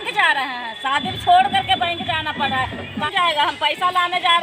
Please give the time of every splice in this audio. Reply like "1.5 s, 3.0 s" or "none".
3.1 s